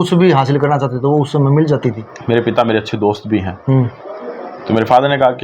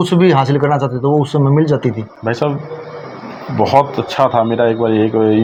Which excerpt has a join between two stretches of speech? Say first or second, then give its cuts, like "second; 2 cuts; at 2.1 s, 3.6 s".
first; 1 cut; at 2.1 s